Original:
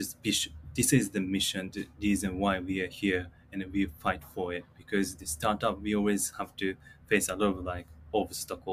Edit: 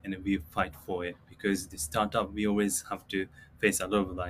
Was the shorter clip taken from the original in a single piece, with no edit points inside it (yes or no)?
yes